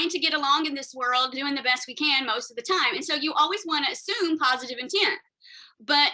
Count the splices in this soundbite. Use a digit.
0